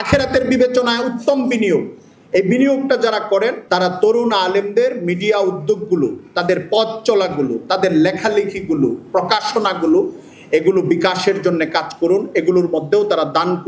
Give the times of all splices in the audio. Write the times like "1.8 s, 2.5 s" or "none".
none